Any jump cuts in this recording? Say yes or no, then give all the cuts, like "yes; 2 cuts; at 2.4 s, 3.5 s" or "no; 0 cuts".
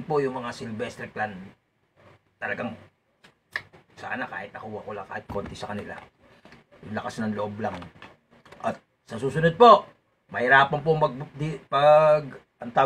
no; 0 cuts